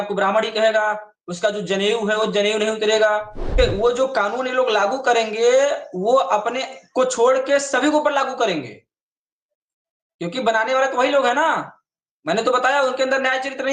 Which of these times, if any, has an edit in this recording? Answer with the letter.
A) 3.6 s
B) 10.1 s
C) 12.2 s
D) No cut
A